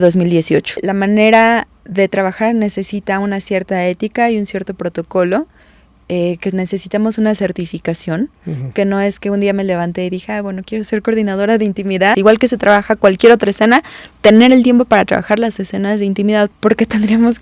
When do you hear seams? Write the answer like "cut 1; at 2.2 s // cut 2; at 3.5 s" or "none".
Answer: cut 1; at 0.9 s // cut 2; at 12.2 s // cut 3; at 16.5 s